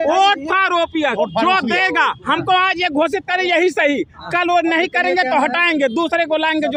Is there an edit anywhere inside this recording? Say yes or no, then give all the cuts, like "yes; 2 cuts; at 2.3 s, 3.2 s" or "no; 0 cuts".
no; 0 cuts